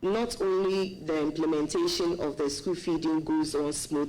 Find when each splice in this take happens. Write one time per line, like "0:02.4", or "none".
none